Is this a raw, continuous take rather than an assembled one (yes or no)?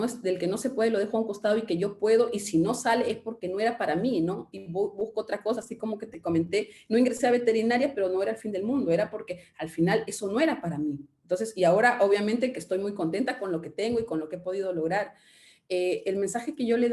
yes